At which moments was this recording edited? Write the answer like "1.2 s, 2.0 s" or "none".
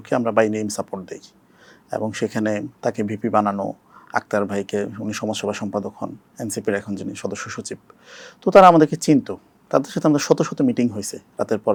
none